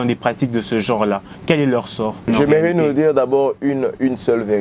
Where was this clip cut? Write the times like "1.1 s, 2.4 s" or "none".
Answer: 2.2 s